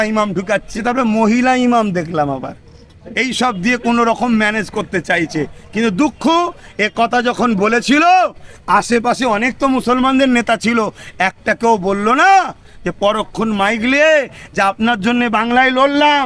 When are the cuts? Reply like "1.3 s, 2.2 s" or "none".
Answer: none